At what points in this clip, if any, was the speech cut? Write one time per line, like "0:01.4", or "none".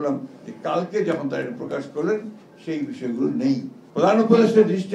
0:03.8